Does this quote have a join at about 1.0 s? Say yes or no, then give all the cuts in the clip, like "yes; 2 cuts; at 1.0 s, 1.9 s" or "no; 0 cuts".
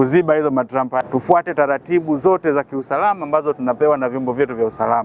yes; 1 cut; at 1.0 s